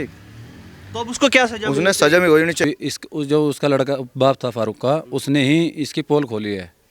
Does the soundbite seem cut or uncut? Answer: cut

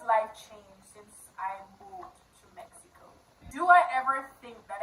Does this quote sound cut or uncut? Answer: cut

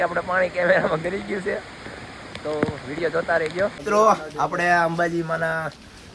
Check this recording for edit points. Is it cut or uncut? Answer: uncut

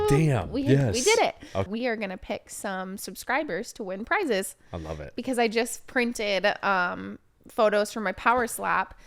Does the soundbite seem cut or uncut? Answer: cut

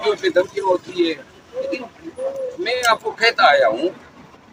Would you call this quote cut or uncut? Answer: uncut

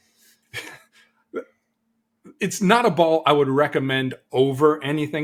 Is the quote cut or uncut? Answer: uncut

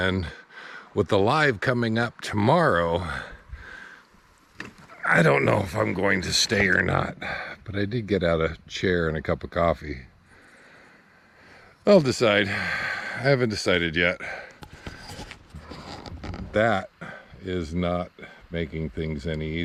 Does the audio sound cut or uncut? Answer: uncut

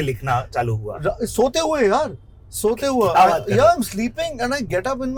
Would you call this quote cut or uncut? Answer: uncut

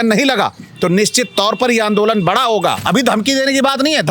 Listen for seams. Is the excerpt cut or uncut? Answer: cut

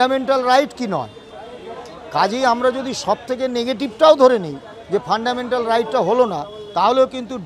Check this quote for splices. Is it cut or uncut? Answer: uncut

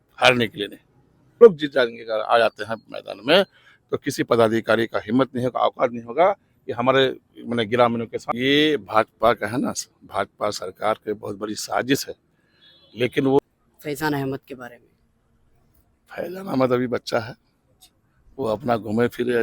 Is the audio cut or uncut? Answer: cut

